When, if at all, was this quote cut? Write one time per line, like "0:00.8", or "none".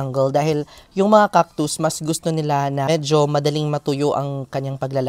0:02.9